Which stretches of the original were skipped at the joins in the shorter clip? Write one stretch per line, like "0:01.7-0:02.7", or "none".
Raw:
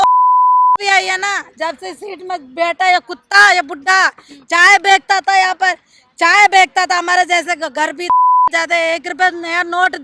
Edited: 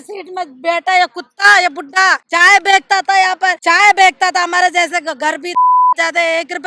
0:04.2-0:04.4
0:05.8-0:06.1